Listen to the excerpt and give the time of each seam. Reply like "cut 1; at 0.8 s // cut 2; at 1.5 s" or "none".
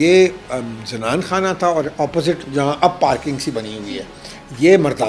cut 1; at 2.4 s